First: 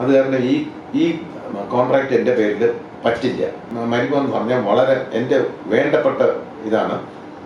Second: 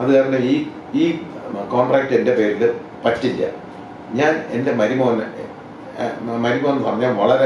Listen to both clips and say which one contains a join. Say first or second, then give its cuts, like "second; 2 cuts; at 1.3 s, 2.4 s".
first; 1 cut; at 3.7 s